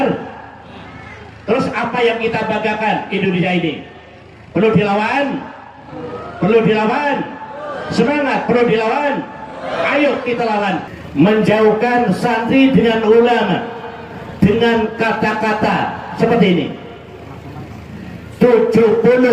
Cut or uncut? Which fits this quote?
cut